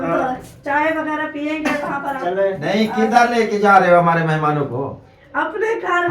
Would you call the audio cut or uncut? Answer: cut